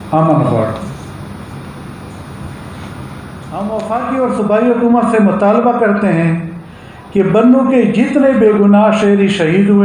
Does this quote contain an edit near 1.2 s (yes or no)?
no